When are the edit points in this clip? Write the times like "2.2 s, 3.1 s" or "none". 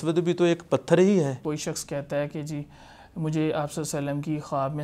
1.4 s